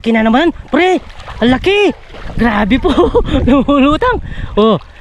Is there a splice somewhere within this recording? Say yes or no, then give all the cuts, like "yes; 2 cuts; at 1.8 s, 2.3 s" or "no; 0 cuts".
no; 0 cuts